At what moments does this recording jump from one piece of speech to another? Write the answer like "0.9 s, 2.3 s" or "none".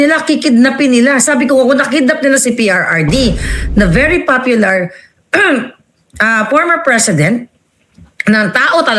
none